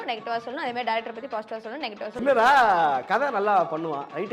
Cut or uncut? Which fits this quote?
cut